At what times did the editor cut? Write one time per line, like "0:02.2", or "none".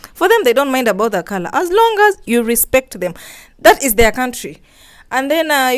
none